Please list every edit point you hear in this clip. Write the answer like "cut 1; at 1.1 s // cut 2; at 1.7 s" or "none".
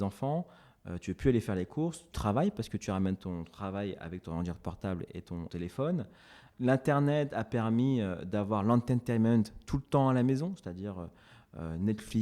cut 1; at 2.1 s // cut 2; at 5.5 s // cut 3; at 6.4 s